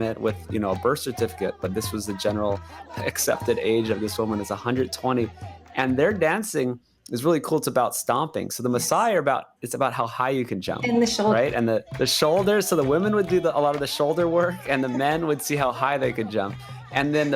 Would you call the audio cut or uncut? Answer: cut